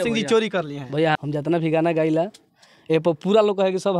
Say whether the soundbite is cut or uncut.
cut